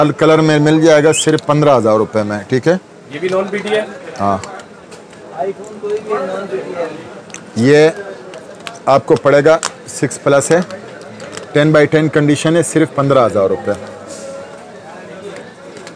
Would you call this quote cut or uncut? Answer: uncut